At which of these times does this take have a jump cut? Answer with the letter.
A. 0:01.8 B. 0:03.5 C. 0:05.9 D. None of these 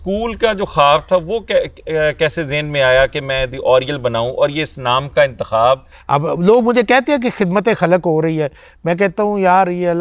C